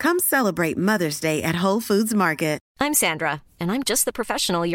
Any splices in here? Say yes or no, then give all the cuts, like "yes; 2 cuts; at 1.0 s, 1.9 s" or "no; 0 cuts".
yes; 1 cut; at 2.7 s